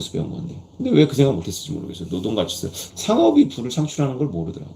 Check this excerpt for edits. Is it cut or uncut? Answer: cut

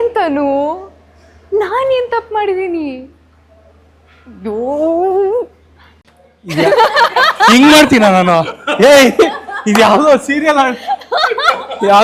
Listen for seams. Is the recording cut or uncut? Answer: uncut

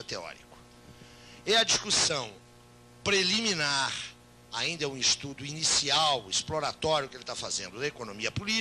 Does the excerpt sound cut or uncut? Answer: uncut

